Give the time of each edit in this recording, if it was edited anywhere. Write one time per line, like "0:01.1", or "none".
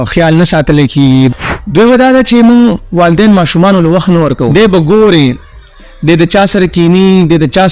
0:01.3
0:04.5